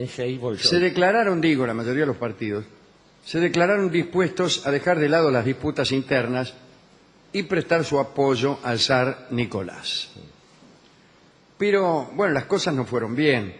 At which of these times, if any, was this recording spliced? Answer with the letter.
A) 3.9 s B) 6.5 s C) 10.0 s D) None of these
A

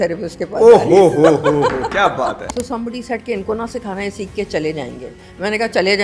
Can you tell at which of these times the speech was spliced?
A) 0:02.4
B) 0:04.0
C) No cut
A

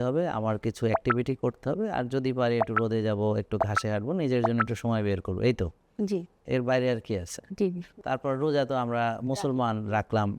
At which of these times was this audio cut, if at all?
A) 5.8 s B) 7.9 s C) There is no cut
B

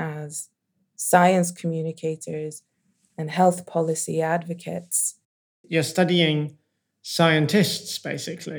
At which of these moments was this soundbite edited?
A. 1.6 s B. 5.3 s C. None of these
B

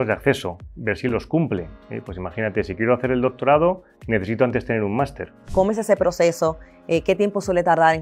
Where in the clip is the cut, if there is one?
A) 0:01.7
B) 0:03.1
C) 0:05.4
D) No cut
C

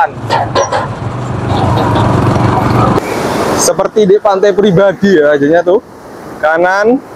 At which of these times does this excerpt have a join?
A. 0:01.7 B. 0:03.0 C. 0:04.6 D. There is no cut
B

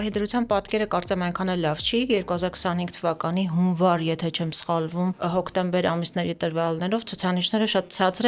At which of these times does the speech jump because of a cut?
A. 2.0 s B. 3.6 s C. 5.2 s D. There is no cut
C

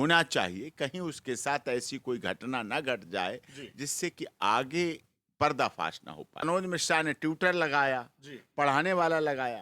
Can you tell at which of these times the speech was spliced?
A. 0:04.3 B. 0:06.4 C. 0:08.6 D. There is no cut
B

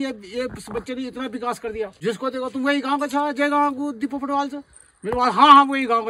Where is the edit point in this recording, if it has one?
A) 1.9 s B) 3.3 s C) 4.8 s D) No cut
A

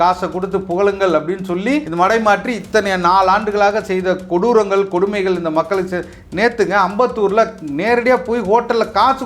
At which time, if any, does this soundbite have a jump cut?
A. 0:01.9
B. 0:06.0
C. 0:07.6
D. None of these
A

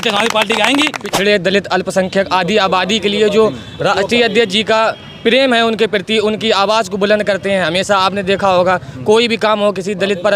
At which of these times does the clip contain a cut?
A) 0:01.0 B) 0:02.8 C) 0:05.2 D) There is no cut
A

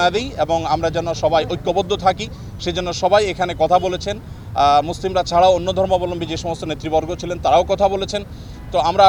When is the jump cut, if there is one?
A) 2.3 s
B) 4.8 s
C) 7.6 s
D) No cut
D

